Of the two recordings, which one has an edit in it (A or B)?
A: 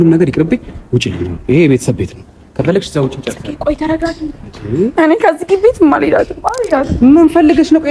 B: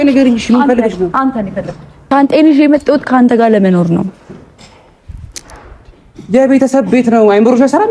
B